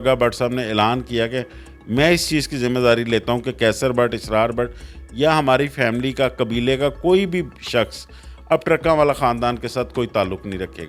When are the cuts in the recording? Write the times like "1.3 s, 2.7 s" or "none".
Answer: none